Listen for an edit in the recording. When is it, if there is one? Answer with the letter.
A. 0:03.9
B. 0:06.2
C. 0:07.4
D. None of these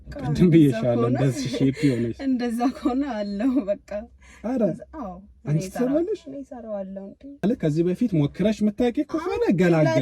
C